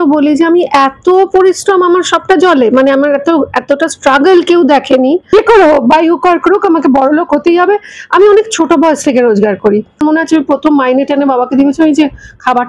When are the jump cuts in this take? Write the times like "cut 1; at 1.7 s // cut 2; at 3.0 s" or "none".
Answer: cut 1; at 5.3 s // cut 2; at 10.0 s